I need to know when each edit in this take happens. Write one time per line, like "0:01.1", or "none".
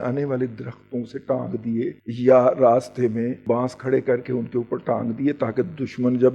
0:02.0
0:03.4